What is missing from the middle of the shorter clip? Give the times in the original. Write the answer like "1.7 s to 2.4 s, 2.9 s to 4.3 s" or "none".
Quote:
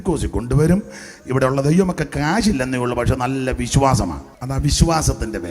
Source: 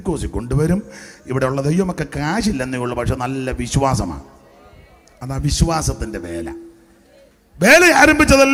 4.3 s to 5.1 s